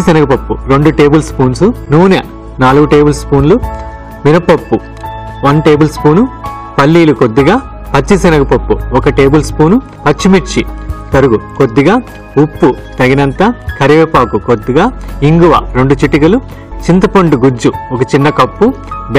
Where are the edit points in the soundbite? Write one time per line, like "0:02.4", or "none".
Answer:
0:16.6